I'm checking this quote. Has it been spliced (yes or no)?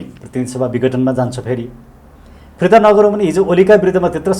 no